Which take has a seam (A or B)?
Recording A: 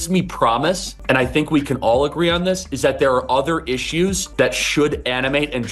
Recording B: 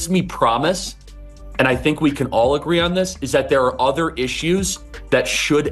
A